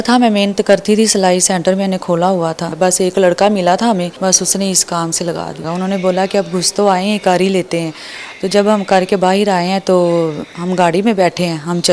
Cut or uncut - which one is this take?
cut